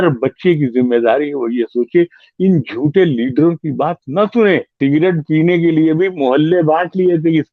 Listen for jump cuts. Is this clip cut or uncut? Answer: cut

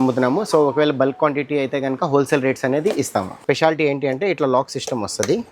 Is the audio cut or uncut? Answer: cut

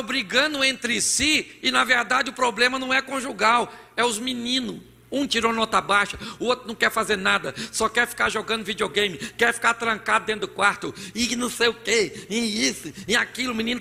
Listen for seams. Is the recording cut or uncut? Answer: uncut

